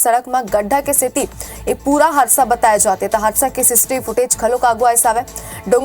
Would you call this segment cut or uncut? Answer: cut